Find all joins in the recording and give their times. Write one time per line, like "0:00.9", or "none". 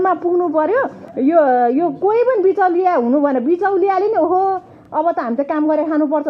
none